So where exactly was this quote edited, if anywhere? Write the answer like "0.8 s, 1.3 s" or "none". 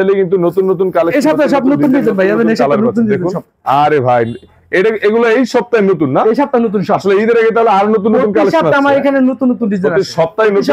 none